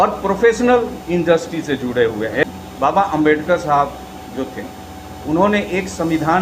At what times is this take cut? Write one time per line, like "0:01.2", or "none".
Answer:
0:02.4